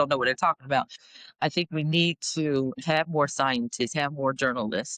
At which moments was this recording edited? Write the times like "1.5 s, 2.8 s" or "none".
1.0 s